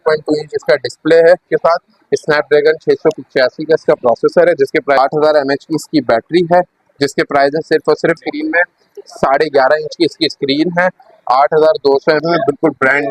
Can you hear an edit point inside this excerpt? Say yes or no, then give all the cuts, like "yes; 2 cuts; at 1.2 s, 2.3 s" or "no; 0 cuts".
yes; 4 cuts; at 1.5 s, 5.0 s, 8.2 s, 12.2 s